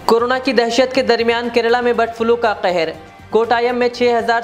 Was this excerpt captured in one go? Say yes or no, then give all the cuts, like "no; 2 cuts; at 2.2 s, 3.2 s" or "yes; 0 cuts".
yes; 0 cuts